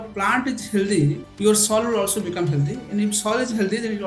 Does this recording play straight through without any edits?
no; 1 cut; at 1.3 s

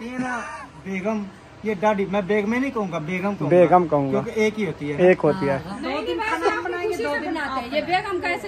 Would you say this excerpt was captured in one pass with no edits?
no; 1 cut; at 5.7 s

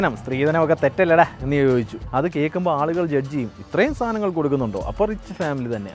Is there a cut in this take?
yes; 1 cut; at 2.0 s

